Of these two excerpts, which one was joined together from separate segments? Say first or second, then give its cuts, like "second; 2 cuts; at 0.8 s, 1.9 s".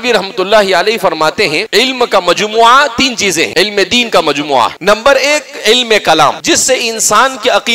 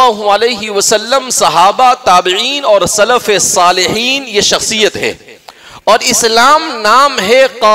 first; 4 cuts; at 1.6 s, 3.5 s, 4.8 s, 6.4 s